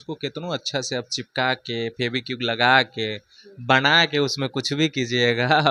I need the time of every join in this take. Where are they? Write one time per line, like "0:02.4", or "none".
none